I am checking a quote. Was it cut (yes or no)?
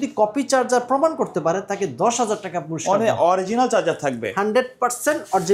no